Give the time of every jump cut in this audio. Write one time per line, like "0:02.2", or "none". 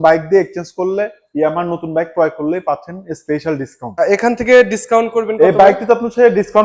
0:04.0